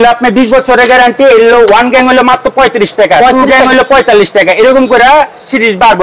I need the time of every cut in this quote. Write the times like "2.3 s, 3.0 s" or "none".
none

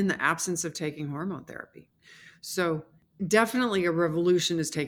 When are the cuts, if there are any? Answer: 3.0 s

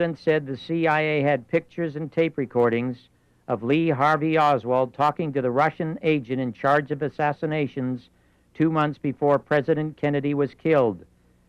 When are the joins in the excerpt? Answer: 8.8 s

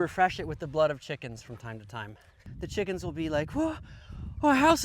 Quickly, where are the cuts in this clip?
2.4 s

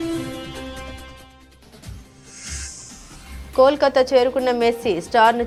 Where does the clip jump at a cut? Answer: none

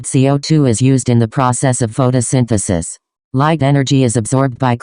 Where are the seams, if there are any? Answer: 3.1 s

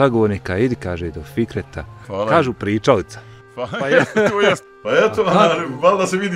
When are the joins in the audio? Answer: 2.1 s, 4.6 s

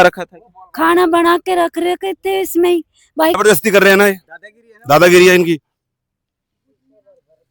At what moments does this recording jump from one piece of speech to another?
3.4 s

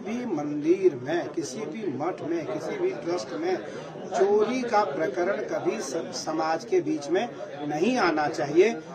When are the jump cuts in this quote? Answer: none

